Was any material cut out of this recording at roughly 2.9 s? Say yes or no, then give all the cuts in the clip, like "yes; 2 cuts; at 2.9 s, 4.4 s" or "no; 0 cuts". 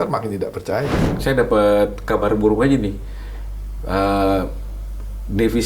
no; 1 cut; at 1.0 s